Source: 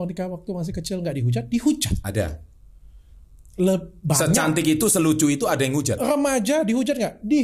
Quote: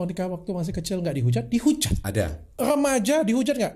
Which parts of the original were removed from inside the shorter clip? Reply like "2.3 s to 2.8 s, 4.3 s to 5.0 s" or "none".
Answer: 2.6 s to 6.0 s